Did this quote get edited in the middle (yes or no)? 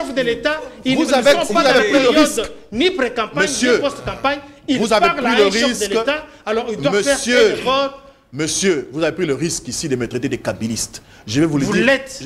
no